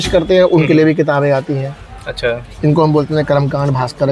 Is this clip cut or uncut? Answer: uncut